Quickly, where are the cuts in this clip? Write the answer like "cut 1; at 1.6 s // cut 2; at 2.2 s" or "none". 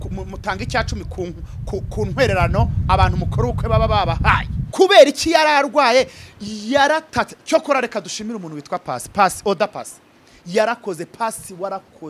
cut 1; at 4.6 s